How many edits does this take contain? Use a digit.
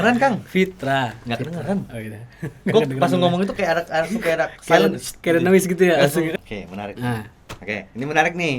1